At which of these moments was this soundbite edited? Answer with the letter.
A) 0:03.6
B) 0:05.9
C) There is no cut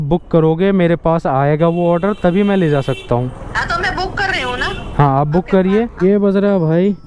B